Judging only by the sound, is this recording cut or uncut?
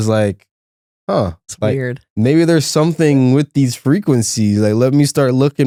uncut